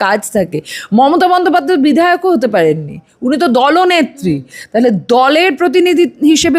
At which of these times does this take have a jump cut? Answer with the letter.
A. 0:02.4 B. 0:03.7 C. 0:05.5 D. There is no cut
D